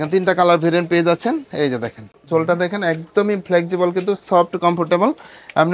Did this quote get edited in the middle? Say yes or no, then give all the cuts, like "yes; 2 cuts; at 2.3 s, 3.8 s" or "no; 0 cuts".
no; 0 cuts